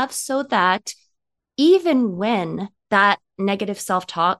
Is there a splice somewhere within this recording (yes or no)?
yes